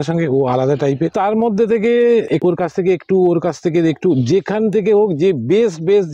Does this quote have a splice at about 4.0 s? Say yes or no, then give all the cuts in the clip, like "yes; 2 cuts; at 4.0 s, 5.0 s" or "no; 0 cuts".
no; 2 cuts; at 1.1 s, 2.3 s